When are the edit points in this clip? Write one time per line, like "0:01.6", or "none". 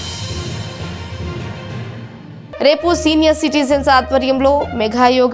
0:02.5